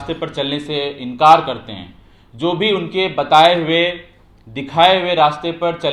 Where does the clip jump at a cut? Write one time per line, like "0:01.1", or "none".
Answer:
none